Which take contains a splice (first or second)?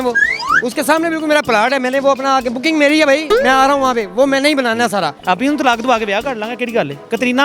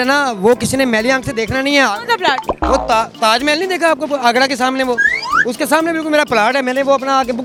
first